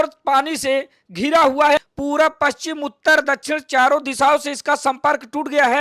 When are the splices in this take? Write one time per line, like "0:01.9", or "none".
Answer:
0:01.8